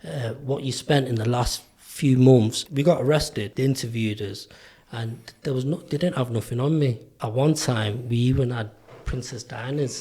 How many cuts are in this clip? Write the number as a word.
three